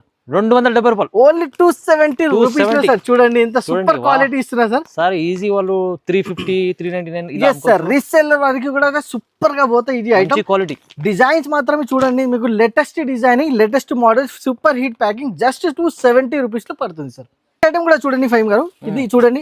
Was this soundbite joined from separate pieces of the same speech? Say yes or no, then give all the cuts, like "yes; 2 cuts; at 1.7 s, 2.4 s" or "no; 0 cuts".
no; 0 cuts